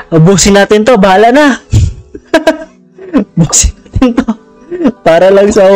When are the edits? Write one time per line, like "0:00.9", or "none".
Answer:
0:02.1